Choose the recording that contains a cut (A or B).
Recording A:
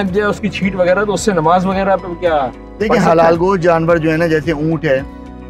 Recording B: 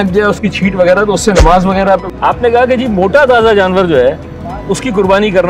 B